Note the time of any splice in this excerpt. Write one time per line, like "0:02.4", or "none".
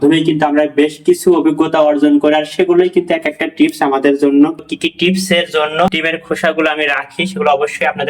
0:04.6
0:05.9